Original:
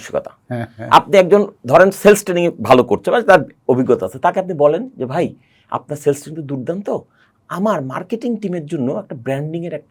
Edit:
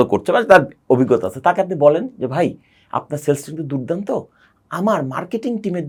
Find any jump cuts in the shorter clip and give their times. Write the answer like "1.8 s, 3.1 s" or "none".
none